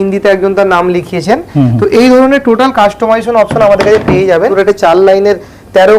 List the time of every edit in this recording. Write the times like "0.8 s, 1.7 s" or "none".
4.5 s